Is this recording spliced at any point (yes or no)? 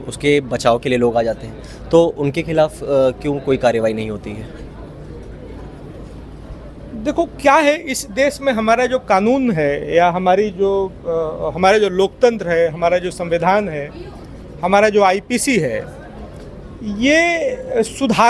no